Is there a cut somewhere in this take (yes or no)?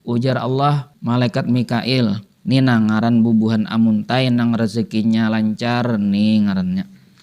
yes